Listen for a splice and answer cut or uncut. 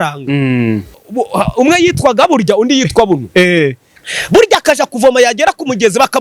cut